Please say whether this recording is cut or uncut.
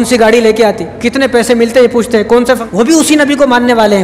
cut